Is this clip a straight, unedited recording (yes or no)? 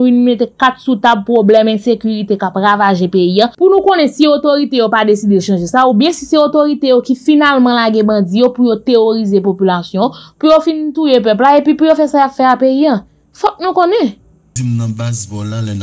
no